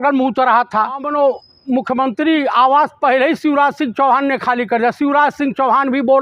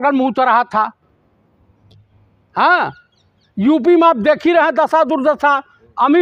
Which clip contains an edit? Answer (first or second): first